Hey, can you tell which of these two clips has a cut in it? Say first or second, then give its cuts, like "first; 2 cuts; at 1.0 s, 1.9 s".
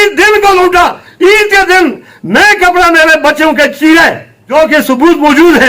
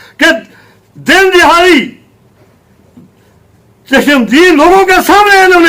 first; 1 cut; at 4.3 s